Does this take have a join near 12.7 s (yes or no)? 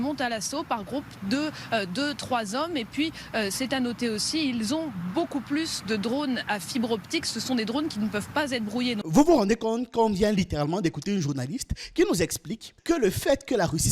no